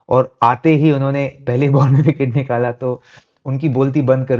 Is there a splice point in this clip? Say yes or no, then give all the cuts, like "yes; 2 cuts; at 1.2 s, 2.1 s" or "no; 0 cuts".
no; 0 cuts